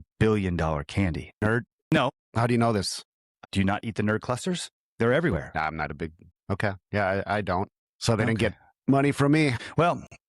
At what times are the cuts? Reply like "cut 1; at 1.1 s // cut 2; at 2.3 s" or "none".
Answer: cut 1; at 3.4 s